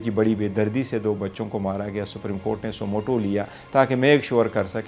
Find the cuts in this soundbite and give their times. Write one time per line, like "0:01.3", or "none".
none

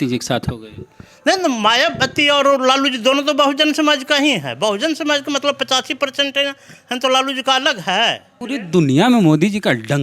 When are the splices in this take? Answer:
0:08.3

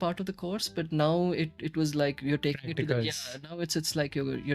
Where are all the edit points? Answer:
none

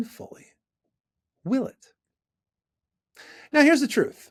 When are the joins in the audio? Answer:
none

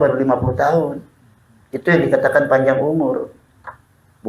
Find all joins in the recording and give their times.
none

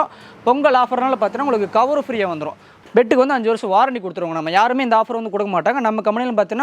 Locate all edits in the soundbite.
0:02.8

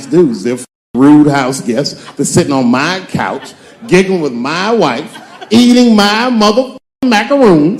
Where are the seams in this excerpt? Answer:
none

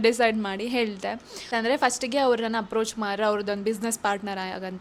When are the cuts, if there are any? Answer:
none

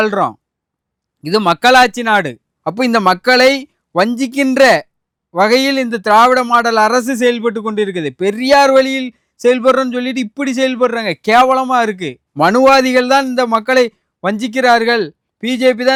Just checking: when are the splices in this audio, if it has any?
none

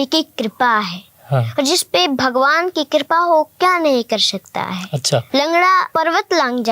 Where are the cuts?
0:05.3
0:05.9

